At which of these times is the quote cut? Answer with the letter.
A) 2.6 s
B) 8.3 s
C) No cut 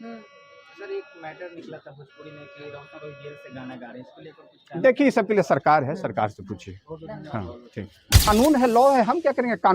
B